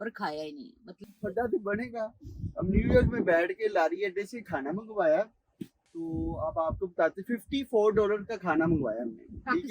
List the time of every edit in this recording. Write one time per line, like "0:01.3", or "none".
0:01.0